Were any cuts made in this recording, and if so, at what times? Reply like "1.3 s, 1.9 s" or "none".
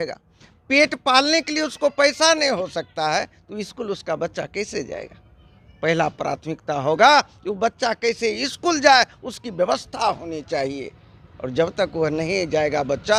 none